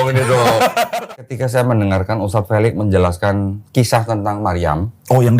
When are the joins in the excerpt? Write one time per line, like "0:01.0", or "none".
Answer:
0:01.1